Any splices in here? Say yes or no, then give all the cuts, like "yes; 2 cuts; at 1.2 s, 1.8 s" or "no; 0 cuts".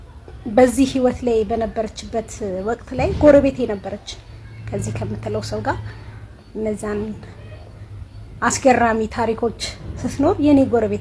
no; 0 cuts